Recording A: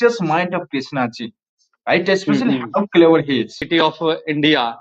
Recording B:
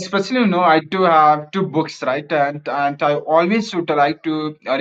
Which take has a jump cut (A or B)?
A